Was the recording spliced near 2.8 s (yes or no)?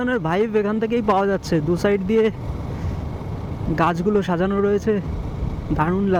no